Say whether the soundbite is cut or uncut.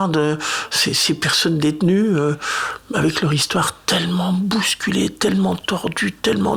uncut